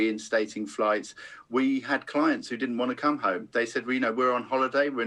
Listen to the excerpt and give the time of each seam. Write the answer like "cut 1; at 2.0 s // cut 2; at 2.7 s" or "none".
none